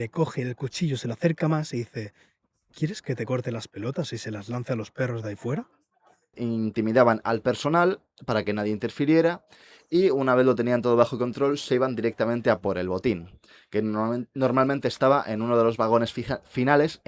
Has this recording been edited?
yes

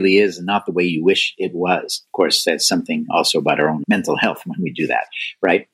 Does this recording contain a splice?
no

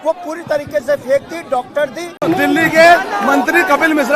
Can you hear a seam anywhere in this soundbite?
yes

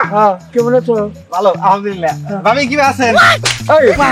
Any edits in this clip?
no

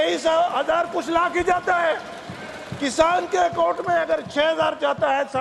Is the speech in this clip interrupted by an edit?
no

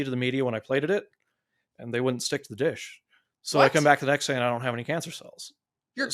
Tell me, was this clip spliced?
no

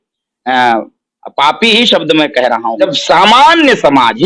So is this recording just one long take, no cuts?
no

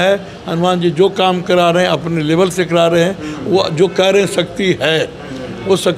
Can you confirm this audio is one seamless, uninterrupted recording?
yes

